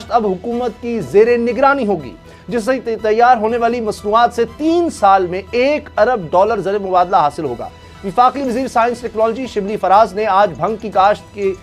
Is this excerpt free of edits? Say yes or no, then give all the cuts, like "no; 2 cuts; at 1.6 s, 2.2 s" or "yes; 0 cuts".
yes; 0 cuts